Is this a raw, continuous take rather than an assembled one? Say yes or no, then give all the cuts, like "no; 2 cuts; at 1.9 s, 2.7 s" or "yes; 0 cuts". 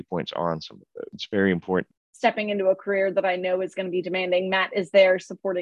no; 2 cuts; at 1.2 s, 2.0 s